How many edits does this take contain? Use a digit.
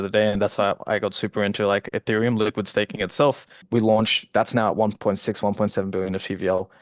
1